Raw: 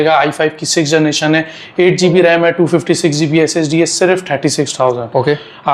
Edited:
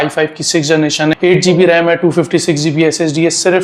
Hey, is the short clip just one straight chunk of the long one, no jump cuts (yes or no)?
no